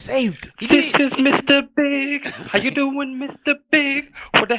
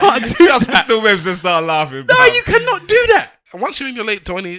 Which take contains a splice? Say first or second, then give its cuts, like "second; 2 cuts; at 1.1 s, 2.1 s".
second; 1 cut; at 3.4 s